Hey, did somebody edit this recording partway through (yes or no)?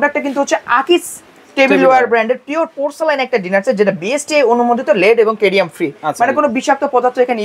no